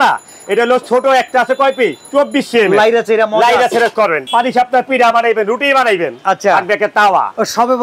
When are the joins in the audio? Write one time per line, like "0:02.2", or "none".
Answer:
0:02.0
0:04.2